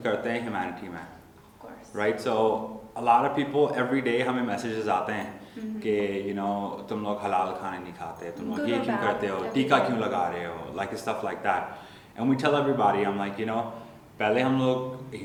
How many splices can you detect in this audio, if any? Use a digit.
0